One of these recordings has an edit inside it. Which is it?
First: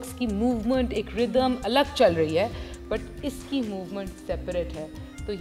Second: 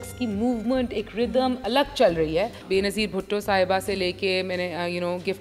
second; 1 cut; at 2.6 s

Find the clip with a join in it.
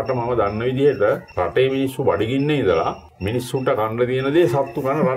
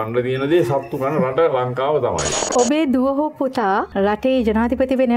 second; 2 cuts; at 2.3 s, 3.9 s

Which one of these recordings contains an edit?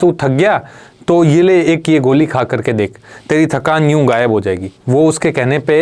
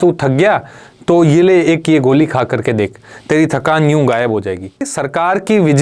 second; 1 cut; at 4.9 s

